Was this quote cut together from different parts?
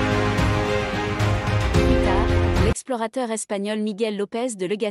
yes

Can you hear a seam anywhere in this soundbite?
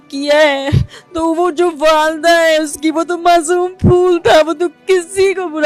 no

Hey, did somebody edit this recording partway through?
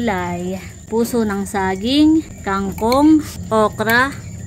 yes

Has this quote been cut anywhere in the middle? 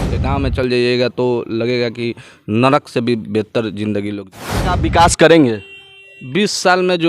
yes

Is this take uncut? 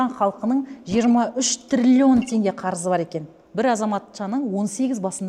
no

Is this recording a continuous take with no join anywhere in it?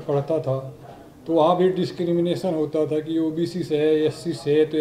yes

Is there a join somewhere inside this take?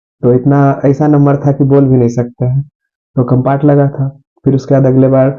no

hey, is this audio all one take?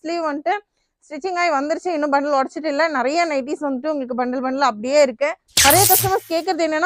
no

